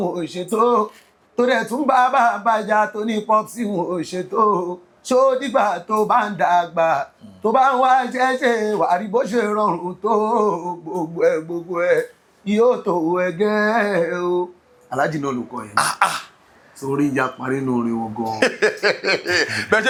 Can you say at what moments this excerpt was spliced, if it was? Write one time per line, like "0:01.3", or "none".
none